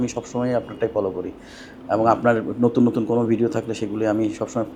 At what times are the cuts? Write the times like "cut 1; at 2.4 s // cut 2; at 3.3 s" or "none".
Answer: none